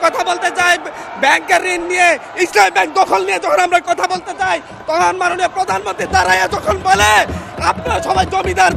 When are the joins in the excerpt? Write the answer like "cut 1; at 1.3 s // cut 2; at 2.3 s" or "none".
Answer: none